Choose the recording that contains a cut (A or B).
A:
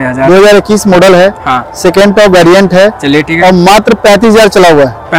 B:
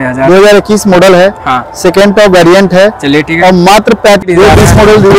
B